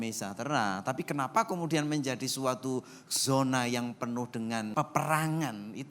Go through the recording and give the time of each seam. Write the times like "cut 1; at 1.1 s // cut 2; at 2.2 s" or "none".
cut 1; at 4.7 s

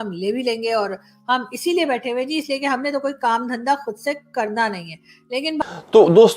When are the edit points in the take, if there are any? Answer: cut 1; at 5.5 s

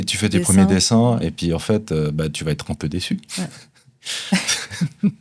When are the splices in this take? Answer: none

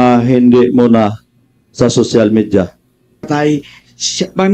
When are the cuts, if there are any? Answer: cut 1; at 3.3 s

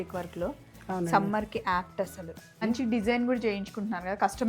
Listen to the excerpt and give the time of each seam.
cut 1; at 2.6 s

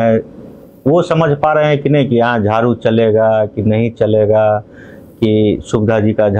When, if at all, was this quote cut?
none

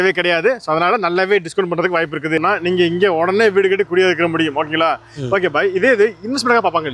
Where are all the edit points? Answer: cut 1; at 2.4 s

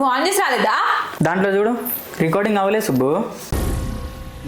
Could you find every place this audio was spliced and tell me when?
cut 1; at 1.1 s // cut 2; at 3.3 s

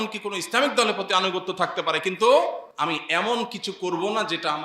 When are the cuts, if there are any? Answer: cut 1; at 2.7 s

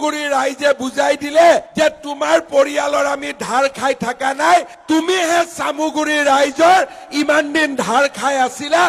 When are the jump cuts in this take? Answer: none

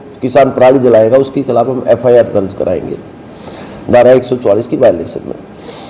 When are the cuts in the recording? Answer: none

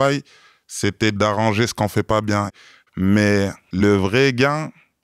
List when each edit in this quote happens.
cut 1; at 1.2 s // cut 2; at 2.5 s // cut 3; at 3.8 s

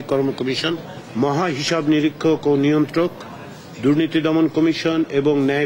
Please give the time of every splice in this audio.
cut 1; at 1.0 s

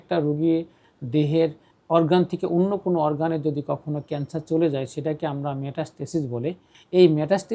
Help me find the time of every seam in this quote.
none

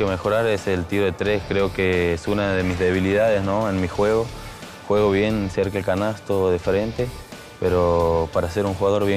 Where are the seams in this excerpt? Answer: none

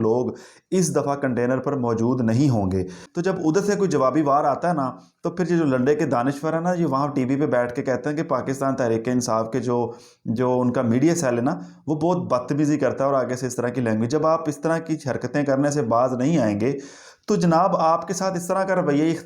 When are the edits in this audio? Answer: cut 1; at 3.0 s

